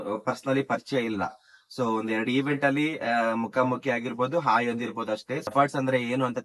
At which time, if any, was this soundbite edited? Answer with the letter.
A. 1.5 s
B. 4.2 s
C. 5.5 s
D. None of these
C